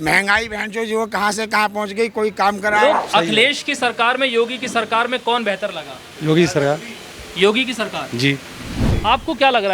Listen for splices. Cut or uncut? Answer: cut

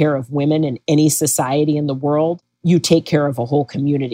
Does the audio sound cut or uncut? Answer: uncut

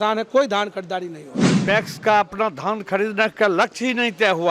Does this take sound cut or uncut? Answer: cut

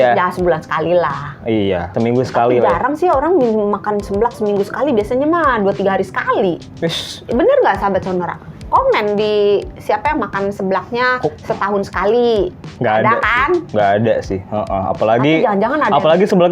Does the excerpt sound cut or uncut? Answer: uncut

